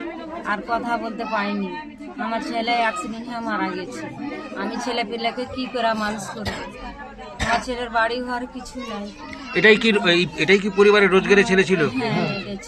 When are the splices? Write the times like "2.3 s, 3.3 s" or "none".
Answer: none